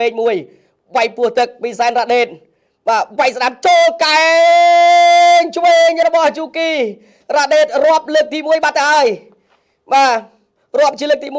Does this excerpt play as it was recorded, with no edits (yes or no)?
yes